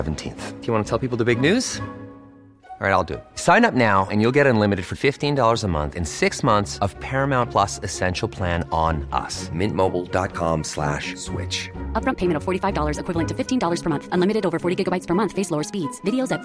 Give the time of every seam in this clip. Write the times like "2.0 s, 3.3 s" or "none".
none

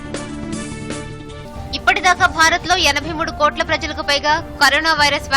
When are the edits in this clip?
1.1 s

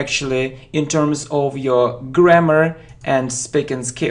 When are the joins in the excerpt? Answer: 2.0 s

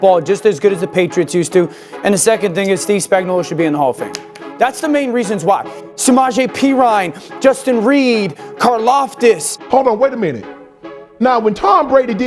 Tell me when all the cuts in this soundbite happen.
5.8 s, 9.5 s

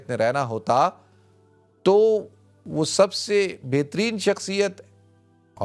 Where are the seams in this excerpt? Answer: none

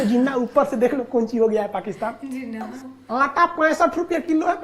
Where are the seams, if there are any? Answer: 2.8 s

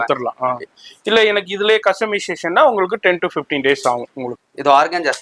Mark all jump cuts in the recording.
4.3 s

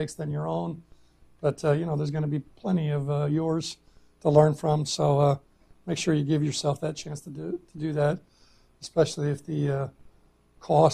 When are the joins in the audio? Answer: 4.3 s

